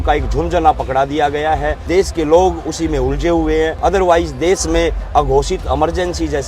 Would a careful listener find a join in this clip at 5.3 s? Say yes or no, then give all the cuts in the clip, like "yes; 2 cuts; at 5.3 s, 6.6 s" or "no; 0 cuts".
no; 2 cuts; at 1.8 s, 3.8 s